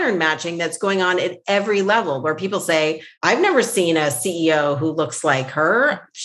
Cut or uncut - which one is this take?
cut